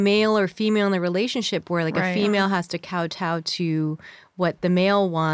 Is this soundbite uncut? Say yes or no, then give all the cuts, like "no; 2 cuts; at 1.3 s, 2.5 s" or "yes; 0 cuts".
yes; 0 cuts